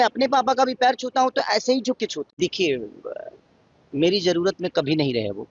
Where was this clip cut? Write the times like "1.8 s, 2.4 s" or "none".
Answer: 2.3 s